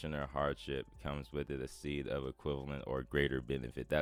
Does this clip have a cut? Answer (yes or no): no